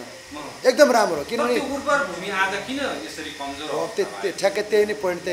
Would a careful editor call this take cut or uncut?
uncut